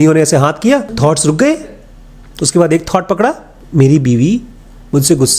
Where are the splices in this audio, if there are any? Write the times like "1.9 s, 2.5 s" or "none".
0.9 s, 3.5 s